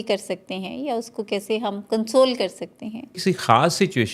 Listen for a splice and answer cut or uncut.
cut